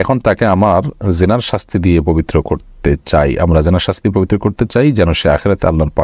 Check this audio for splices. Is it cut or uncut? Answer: uncut